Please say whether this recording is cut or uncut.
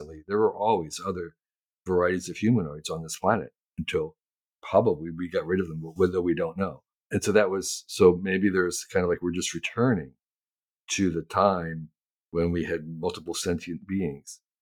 uncut